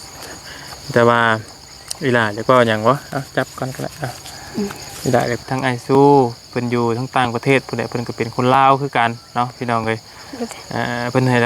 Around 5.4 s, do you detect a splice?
yes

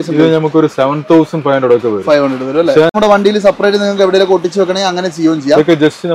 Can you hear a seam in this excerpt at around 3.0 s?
yes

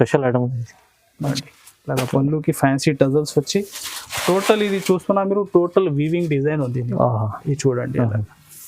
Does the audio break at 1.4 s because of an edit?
yes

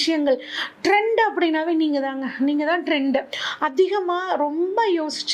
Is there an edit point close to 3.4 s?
yes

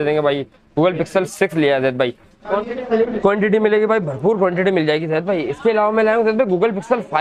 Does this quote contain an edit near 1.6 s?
no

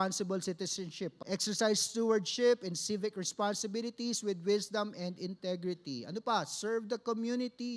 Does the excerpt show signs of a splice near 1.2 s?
yes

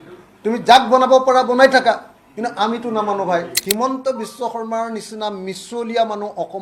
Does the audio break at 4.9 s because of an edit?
no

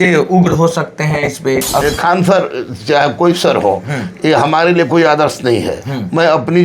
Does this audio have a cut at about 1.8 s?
yes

